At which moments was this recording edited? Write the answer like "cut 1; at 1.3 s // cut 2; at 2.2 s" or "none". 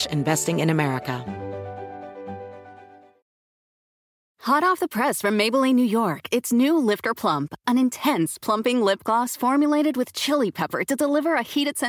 cut 1; at 1.2 s